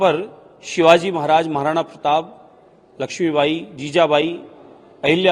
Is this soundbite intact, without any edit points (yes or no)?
yes